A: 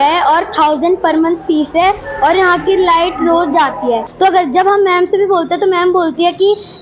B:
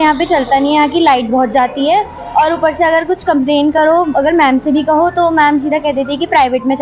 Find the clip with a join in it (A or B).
A